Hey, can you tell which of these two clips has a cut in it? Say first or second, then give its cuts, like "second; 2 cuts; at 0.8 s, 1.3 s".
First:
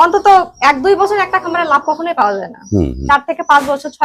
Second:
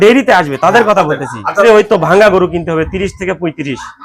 second; 1 cut; at 1.6 s